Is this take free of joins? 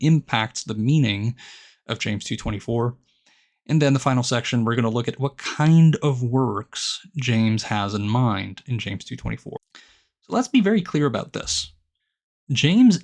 no; 1 cut; at 9.6 s

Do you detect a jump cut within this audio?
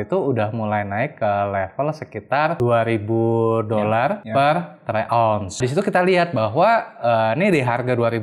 yes; 3 cuts; at 2.6 s, 4.2 s, 5.6 s

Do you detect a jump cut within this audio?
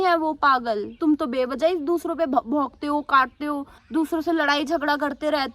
yes; 2 cuts; at 1.0 s, 3.7 s

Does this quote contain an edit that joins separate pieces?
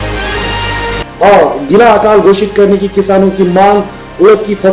no; 0 cuts

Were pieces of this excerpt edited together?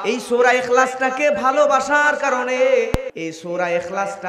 yes; 1 cut; at 3.1 s

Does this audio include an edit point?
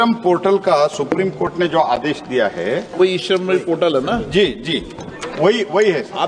yes; 1 cut; at 2.9 s

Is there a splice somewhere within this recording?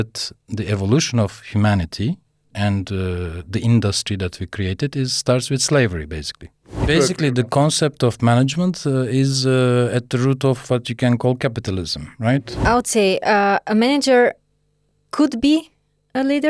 yes; 2 cuts; at 6.7 s, 12.6 s

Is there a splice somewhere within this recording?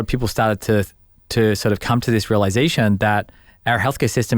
no; 0 cuts

